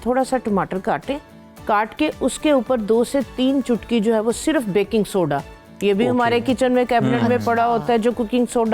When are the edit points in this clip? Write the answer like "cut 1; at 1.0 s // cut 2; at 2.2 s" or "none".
none